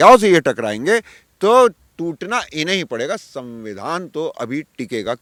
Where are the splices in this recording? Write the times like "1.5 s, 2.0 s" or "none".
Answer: none